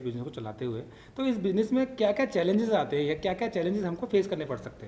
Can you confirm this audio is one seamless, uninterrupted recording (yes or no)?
yes